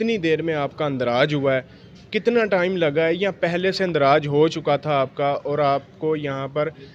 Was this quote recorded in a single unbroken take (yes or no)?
yes